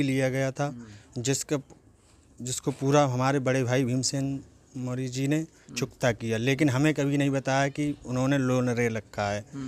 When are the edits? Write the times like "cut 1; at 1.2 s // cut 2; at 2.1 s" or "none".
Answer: none

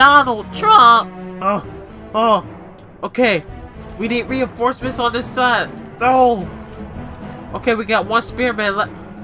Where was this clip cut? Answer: cut 1; at 1.2 s

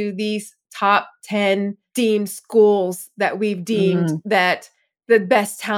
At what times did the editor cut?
cut 1; at 1.8 s

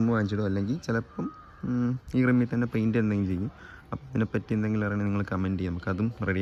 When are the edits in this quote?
none

